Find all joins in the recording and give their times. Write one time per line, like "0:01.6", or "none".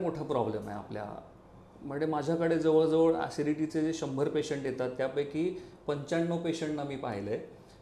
none